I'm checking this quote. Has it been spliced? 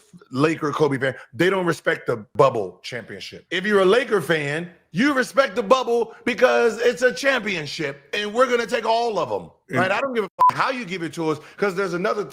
yes; 2 cuts; at 2.3 s, 4.9 s

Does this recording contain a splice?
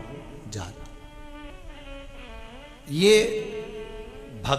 yes; 1 cut; at 1.5 s

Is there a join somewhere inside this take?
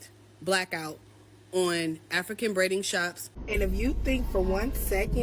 yes; 1 cut; at 3.4 s

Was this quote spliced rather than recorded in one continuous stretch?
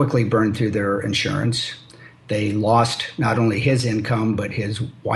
no; 0 cuts

